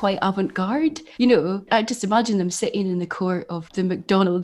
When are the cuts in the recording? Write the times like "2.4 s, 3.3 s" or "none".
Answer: 1.0 s, 1.7 s, 3.6 s